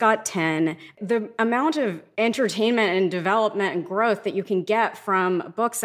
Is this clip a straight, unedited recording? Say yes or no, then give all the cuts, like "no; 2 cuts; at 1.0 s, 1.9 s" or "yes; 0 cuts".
no; 2 cuts; at 0.8 s, 2.0 s